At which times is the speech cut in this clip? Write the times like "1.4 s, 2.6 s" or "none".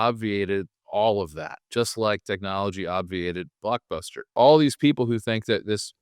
4.4 s